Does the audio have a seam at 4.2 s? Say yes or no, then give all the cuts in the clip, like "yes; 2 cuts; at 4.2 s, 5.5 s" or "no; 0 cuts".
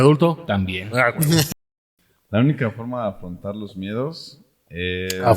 no; 1 cut; at 1.6 s